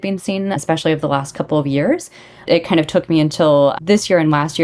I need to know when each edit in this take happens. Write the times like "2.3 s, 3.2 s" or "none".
2.4 s